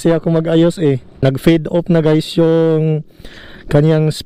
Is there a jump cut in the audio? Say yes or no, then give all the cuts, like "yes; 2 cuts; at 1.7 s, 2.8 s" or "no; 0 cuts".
yes; 1 cut; at 1.1 s